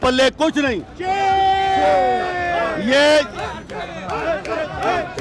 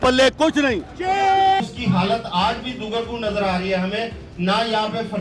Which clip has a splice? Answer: second; 1 cut; at 1.6 s

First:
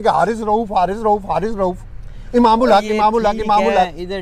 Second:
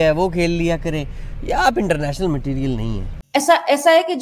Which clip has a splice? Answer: second; 1 cut; at 3.1 s

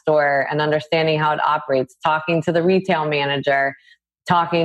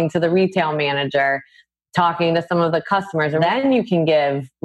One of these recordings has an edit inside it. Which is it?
second; 1 cut; at 3.4 s

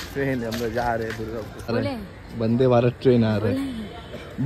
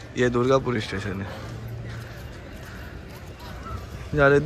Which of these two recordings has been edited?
first; 1 cut; at 1.6 s

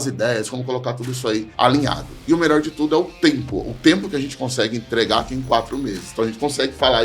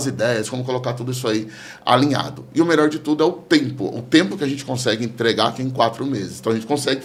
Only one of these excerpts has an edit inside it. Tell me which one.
first; 1 cut; at 1.5 s

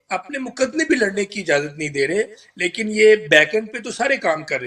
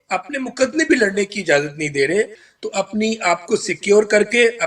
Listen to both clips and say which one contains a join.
second; 1 cut; at 2.4 s

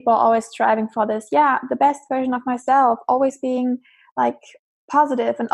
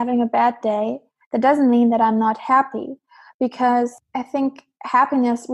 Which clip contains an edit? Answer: second; 1 cut; at 4.0 s

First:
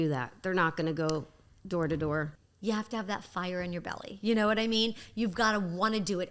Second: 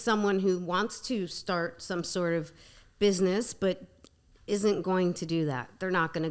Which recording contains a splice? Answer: first; 1 cut; at 2.4 s

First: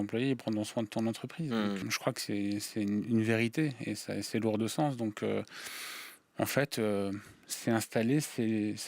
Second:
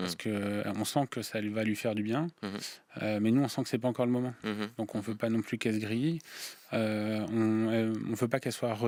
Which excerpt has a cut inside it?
first; 1 cut; at 1.8 s

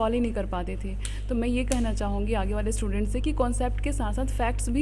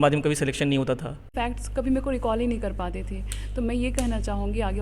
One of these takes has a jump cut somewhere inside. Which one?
second; 1 cut; at 1.3 s

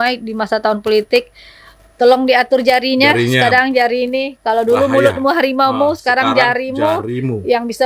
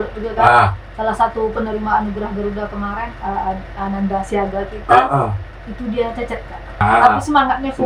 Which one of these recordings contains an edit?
second; 1 cut; at 6.8 s

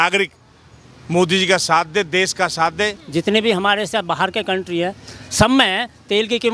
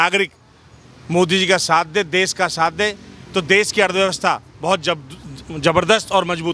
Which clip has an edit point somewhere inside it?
first; 1 cut; at 3.0 s

